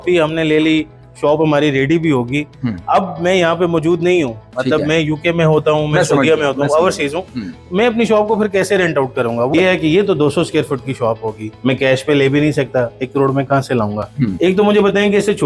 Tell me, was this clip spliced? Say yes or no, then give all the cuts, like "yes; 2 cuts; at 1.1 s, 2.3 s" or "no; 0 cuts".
yes; 3 cuts; at 9.5 s, 11.5 s, 14.3 s